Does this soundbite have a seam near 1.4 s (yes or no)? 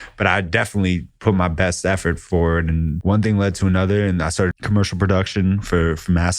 no